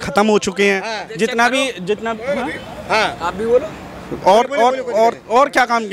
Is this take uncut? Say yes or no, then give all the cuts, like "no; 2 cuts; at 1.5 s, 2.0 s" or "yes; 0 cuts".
yes; 0 cuts